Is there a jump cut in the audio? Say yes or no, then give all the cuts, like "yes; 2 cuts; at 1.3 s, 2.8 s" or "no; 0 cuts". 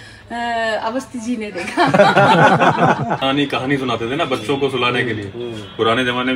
yes; 1 cut; at 3.2 s